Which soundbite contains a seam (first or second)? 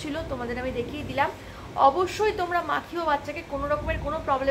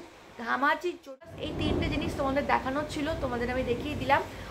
second